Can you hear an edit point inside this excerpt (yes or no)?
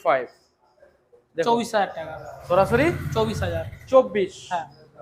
no